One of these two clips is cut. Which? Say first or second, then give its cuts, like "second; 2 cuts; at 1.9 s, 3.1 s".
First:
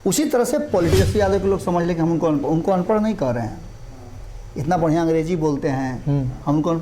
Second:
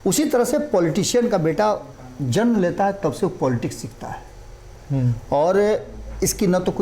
first; 1 cut; at 0.9 s